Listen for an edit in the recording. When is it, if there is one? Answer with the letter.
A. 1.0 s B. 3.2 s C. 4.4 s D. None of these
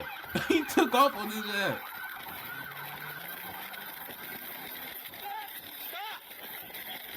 B